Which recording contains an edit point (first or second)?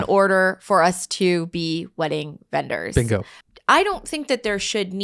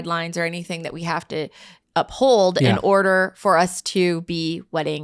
first